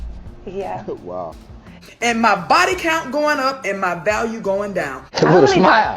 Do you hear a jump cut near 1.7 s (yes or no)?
yes